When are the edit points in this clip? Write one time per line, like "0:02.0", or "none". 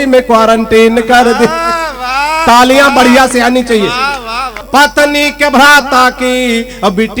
0:04.6